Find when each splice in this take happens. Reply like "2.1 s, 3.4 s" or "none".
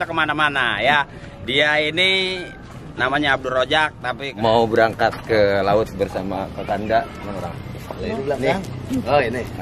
4.3 s